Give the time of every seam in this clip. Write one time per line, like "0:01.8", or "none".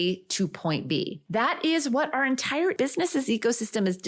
0:01.2
0:02.7